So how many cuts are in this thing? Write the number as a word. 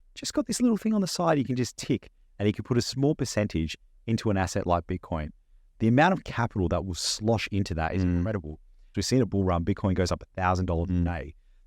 one